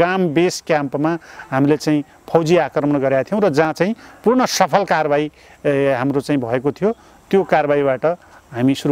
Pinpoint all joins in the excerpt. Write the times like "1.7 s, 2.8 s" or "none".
none